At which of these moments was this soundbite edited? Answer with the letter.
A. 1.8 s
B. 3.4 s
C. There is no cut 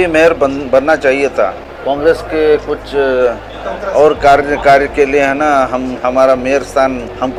C